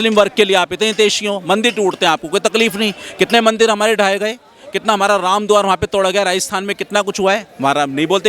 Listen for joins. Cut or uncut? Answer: uncut